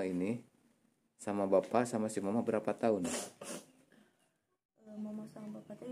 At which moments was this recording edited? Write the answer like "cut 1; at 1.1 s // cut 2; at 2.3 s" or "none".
cut 1; at 4.9 s